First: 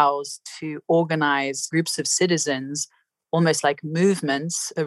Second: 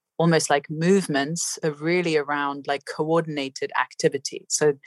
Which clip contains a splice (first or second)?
first